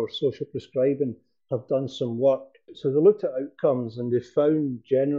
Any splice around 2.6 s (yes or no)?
yes